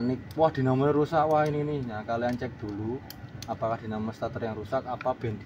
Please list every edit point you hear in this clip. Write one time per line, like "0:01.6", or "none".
none